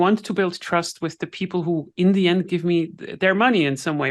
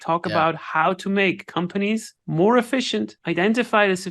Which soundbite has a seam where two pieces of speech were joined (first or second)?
second